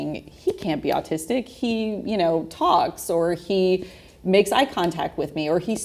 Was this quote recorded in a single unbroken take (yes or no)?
yes